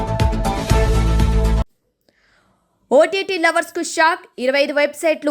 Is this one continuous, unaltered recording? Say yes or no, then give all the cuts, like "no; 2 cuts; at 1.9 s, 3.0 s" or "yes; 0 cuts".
no; 1 cut; at 1.9 s